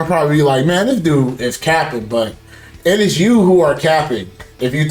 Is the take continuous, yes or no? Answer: yes